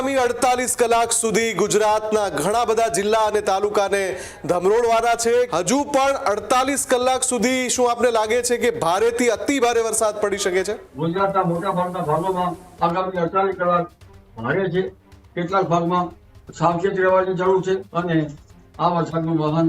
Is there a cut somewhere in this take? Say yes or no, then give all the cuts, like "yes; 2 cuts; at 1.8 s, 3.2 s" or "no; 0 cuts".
yes; 3 cuts; at 5.5 s, 10.9 s, 17.9 s